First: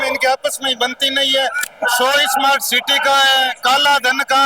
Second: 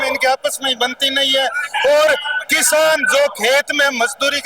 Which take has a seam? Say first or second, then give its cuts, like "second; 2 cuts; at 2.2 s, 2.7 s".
first; 1 cut; at 1.6 s